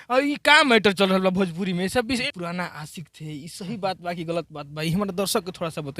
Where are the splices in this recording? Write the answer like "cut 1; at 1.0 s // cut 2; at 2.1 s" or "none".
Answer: cut 1; at 2.2 s